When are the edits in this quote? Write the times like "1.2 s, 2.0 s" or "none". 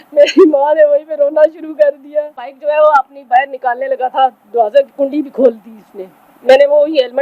2.6 s

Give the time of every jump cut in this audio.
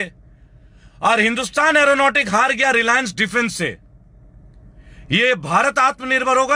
none

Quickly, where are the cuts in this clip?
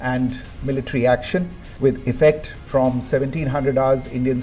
1.6 s

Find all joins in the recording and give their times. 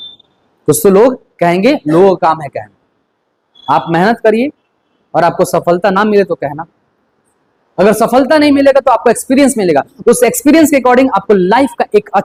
none

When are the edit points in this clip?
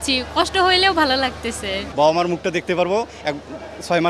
1.8 s

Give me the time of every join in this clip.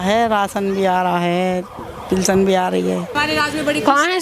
3.1 s

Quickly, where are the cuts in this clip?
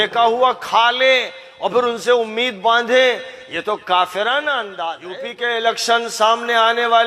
5.1 s

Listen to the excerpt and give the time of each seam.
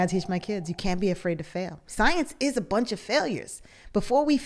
1.8 s

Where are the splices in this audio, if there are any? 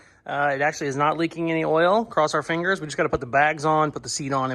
none

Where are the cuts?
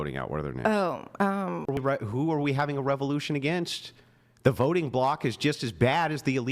1.8 s

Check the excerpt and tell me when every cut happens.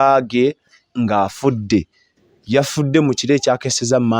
none

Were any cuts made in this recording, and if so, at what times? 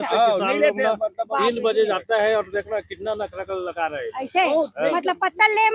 none

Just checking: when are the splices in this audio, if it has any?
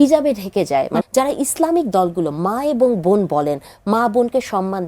1.1 s

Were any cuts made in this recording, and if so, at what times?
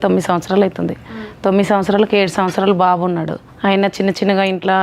3.4 s

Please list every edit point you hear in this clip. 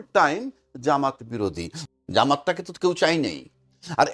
1.7 s

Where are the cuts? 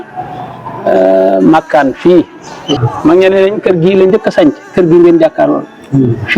2.8 s

